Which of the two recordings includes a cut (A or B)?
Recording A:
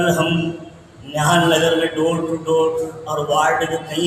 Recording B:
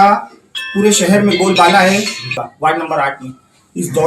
B